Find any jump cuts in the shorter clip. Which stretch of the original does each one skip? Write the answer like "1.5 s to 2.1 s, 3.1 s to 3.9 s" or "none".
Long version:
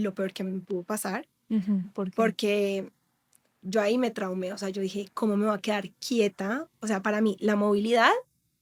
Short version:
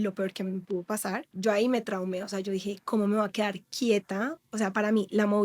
1.3 s to 3.6 s